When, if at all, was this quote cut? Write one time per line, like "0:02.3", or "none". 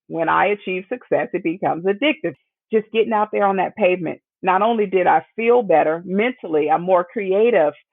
0:02.3

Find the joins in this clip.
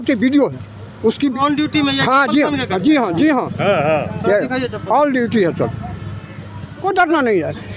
0:01.3
0:06.8

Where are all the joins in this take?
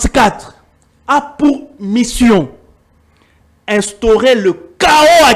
none

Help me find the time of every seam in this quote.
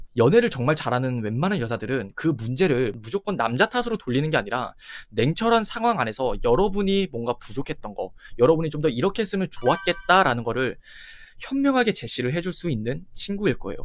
none

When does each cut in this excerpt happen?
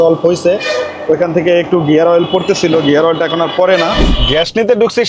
0:04.2

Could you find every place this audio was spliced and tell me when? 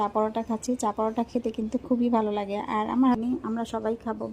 0:03.2

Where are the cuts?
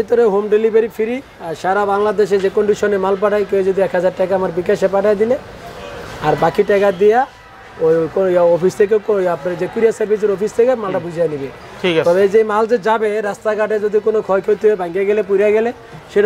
none

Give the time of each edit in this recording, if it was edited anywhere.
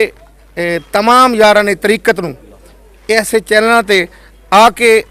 none

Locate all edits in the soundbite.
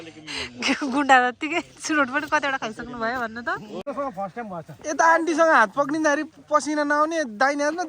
0:03.8

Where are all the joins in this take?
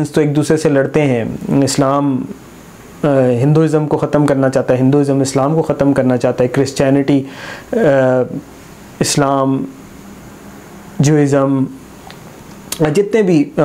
none

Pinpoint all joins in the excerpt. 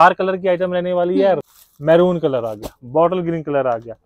0:01.4

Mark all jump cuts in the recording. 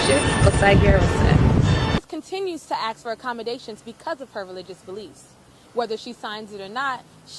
0:02.0

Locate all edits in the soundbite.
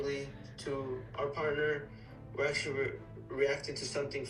none

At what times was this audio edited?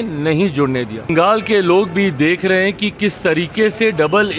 0:01.1

